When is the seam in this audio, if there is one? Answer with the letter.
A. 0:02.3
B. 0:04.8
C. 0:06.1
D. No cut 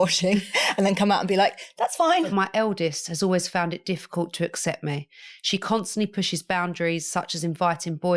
A